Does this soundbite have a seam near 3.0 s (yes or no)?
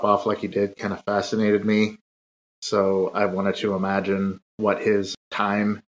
no